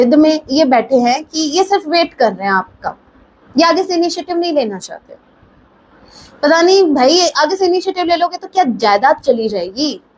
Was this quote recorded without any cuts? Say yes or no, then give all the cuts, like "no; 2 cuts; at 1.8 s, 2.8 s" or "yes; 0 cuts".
yes; 0 cuts